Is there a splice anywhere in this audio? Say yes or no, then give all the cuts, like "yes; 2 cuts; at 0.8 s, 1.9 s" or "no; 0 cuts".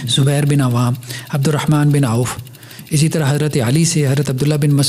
no; 0 cuts